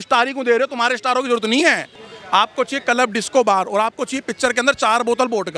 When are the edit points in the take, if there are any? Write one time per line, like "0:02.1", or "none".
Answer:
0:02.0